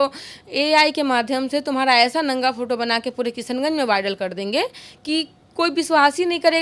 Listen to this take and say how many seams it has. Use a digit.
0